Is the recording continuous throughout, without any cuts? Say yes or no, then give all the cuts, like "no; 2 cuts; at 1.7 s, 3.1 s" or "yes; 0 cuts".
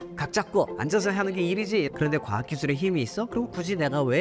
no; 1 cut; at 1.9 s